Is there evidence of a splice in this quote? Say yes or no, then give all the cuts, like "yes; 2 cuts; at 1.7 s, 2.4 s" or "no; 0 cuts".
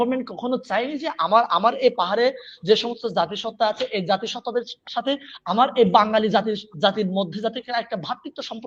no; 0 cuts